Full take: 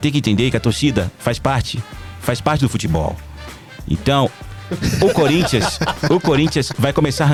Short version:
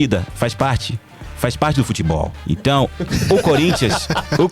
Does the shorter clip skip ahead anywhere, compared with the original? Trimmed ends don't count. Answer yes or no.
yes